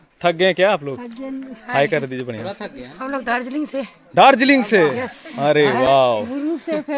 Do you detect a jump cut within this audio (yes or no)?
no